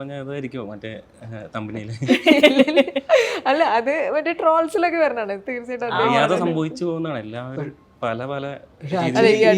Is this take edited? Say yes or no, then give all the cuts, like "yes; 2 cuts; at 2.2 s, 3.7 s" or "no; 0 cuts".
no; 0 cuts